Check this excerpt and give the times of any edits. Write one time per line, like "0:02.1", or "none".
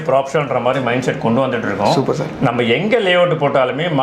none